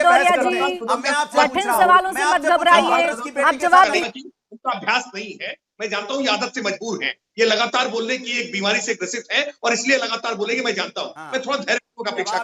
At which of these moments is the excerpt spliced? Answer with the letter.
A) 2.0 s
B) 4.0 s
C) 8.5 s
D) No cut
B